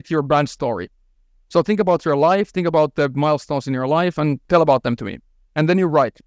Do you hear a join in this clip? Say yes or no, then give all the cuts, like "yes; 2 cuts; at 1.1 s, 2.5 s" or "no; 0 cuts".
yes; 1 cut; at 4.4 s